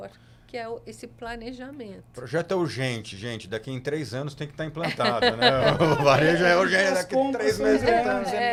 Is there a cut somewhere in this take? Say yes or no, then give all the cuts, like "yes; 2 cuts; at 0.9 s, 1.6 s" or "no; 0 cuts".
no; 0 cuts